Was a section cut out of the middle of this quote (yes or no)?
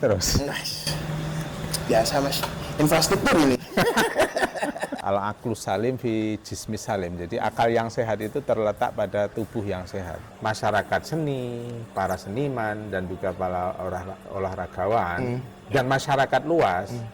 yes